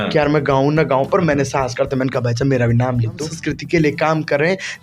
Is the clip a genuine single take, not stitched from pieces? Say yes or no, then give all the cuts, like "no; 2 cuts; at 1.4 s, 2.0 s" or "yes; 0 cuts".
no; 1 cut; at 3.3 s